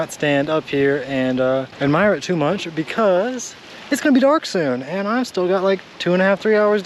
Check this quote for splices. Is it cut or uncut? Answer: uncut